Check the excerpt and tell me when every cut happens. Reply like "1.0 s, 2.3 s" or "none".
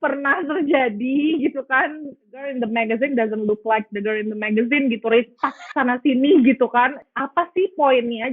2.5 s, 7.0 s